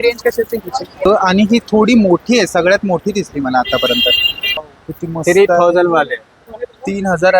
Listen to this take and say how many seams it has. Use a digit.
2